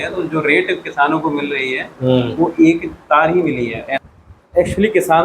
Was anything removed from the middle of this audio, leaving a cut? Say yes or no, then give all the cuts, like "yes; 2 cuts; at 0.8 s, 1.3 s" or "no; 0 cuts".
yes; 1 cut; at 3.9 s